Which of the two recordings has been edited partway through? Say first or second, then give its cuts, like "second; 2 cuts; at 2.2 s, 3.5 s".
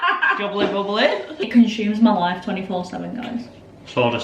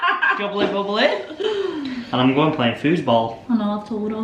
first; 1 cut; at 1.4 s